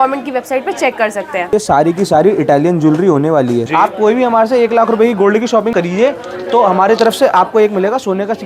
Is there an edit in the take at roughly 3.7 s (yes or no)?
yes